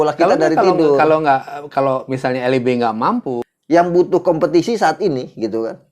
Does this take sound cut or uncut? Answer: cut